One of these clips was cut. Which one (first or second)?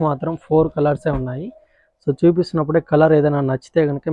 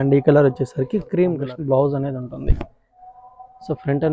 second